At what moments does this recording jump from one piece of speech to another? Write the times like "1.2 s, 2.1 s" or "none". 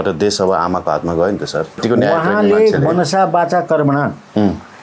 1.8 s